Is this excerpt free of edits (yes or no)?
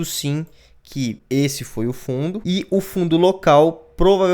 no